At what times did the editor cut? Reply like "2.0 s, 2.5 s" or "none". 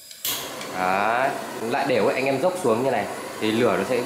1.5 s